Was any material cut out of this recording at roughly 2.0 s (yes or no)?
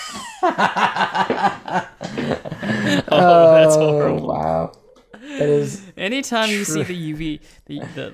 no